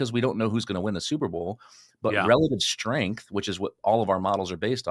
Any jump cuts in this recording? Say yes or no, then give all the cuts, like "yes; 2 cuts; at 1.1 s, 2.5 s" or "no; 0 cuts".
no; 0 cuts